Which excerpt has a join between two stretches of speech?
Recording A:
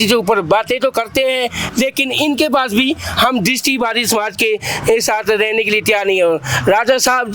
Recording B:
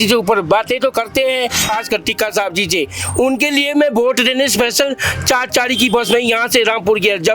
B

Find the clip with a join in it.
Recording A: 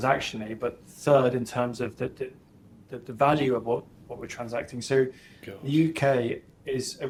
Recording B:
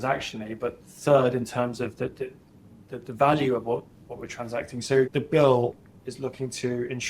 B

